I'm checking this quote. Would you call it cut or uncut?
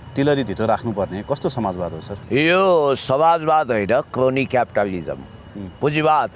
cut